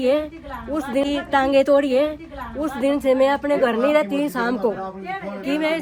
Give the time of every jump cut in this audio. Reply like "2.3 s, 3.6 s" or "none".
none